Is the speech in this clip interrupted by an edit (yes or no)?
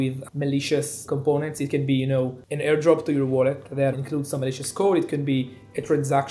yes